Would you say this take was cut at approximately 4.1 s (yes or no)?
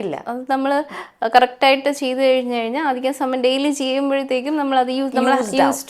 no